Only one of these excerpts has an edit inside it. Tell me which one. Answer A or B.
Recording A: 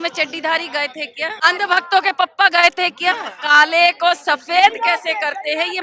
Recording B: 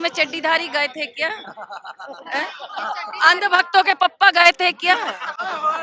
A